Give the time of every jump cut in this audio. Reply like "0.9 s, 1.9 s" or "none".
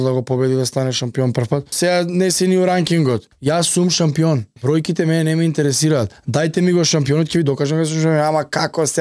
1.7 s, 3.3 s, 4.5 s, 6.2 s